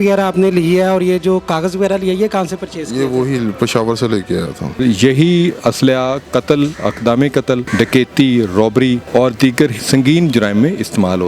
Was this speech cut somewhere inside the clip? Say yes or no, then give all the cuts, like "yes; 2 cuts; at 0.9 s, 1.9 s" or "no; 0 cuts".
yes; 4 cuts; at 4.8 s, 7.7 s, 9.0 s, 9.8 s